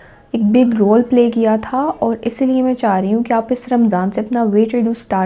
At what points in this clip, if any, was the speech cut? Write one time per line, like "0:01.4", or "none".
none